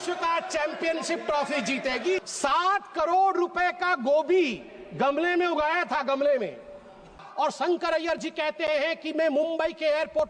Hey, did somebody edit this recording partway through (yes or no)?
yes